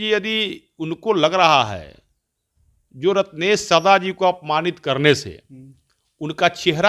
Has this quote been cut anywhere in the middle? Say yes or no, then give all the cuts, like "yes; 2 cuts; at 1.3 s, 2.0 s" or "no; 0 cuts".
no; 0 cuts